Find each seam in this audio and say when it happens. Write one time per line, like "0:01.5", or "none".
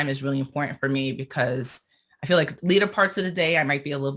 0:02.6